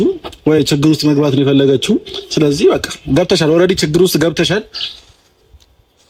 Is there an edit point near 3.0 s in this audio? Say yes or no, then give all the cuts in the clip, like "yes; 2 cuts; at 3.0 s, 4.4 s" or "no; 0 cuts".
no; 0 cuts